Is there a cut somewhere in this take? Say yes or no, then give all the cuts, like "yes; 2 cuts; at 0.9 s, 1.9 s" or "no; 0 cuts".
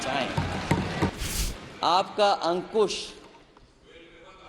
yes; 1 cut; at 1.1 s